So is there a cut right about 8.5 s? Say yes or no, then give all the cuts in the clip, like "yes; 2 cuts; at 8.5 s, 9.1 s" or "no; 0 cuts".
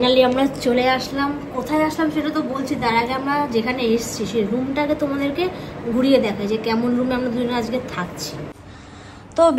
yes; 1 cut; at 8.5 s